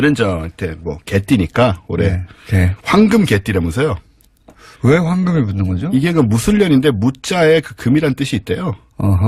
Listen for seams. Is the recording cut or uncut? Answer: uncut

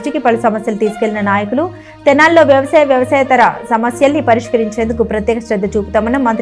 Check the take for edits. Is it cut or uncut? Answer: uncut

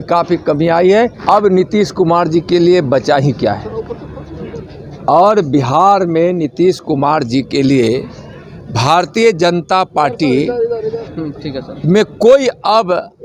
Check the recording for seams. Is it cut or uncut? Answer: cut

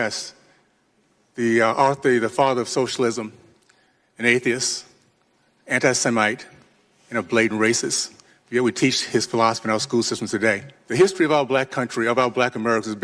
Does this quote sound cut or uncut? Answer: cut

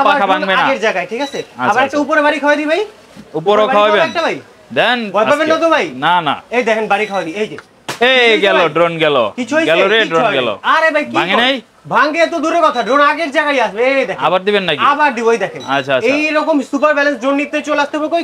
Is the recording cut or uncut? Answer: uncut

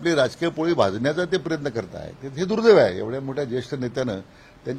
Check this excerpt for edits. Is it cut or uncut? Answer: uncut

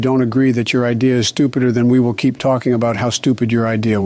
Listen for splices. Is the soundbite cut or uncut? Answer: uncut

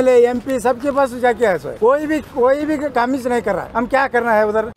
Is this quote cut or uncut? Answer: cut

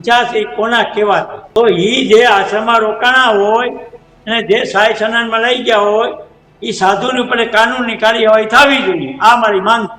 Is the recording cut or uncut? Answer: cut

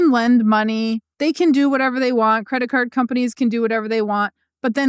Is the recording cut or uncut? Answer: cut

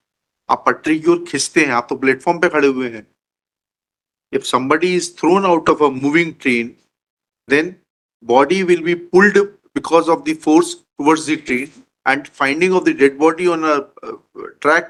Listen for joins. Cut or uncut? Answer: uncut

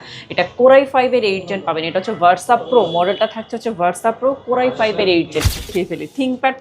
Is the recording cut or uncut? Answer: cut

